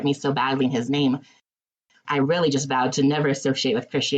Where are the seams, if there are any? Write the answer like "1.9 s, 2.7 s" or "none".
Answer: 1.5 s